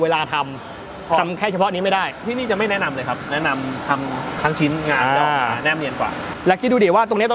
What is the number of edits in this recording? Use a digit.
4